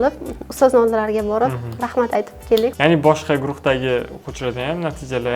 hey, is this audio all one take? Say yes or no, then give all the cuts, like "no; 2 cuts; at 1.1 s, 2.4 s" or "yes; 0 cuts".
no; 1 cut; at 2.7 s